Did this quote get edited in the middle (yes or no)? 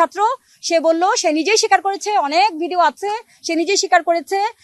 no